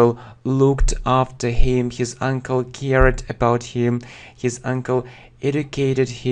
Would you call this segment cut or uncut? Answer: uncut